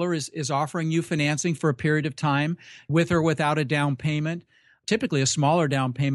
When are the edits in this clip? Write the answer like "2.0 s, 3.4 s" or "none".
2.9 s, 4.8 s